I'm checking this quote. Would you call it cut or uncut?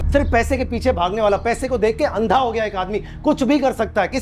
uncut